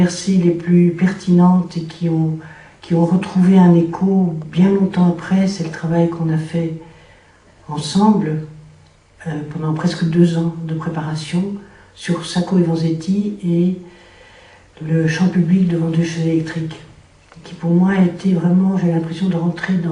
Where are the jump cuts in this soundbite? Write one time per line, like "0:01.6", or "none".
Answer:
0:15.4

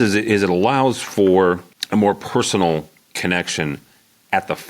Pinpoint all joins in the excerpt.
0:01.7

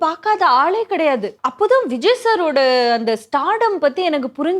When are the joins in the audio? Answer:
0:01.4

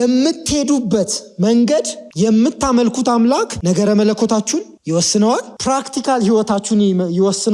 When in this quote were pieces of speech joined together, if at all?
0:02.0
0:03.5
0:04.7
0:05.5

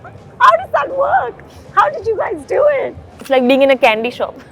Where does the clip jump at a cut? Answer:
0:03.1

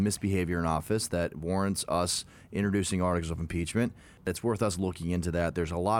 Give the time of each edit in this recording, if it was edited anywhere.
0:04.2

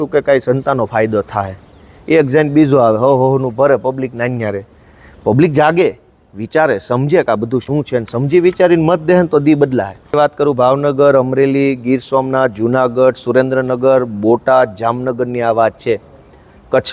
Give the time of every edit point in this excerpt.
0:10.1

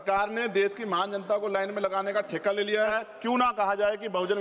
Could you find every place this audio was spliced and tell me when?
0:02.9

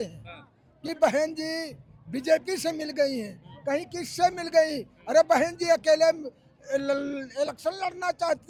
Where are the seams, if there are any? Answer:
none

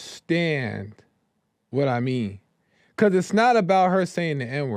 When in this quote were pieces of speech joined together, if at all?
none

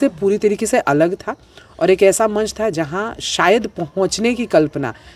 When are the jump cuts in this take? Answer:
none

